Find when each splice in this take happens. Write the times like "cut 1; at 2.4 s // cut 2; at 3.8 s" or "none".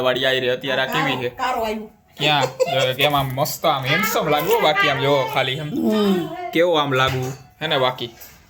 none